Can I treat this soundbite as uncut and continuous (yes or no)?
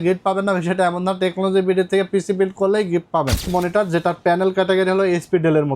no